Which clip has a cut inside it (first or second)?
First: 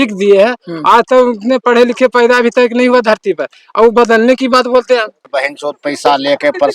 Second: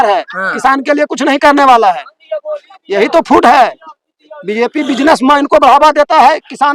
first